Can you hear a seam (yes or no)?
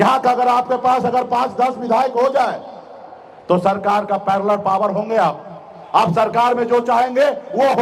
no